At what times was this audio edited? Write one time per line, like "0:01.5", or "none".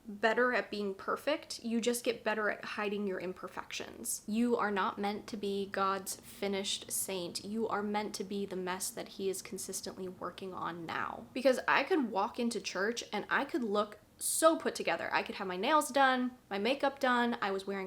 0:04.2
0:11.2